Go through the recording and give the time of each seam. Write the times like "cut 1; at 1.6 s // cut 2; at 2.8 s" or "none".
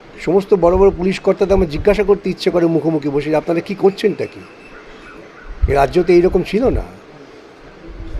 none

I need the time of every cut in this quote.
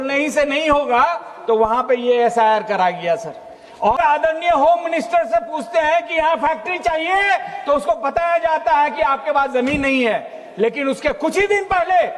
cut 1; at 4.0 s

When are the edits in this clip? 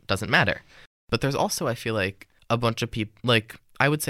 cut 1; at 0.9 s // cut 2; at 2.3 s

